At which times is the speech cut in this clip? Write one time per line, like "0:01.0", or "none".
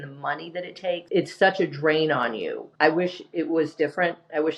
0:01.0
0:02.6

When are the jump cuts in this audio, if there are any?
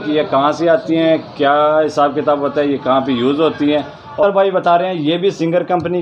0:04.2

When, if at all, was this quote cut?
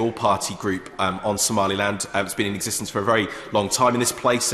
none

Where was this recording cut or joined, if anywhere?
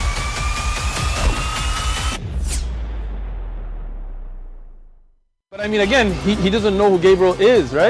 none

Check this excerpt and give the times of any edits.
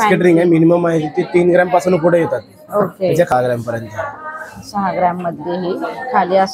0:03.3

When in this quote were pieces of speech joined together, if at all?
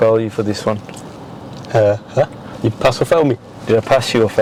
none

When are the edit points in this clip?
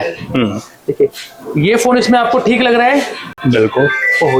none

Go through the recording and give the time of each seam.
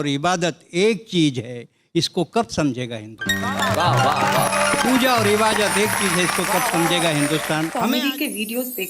0:07.8

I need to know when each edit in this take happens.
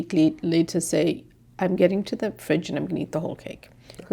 none

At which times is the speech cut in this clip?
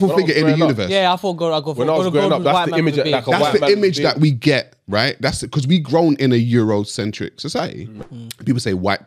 0:07.9

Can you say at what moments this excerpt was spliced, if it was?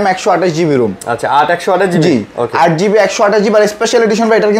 none

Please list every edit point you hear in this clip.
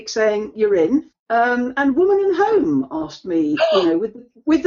0:01.1

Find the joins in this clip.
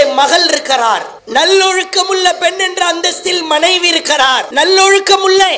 0:01.1
0:04.5

